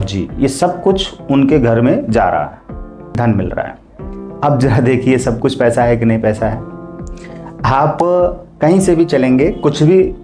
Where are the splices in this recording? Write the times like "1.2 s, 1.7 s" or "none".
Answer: 3.2 s